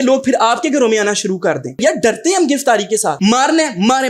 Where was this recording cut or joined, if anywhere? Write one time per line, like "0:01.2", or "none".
0:01.8
0:03.2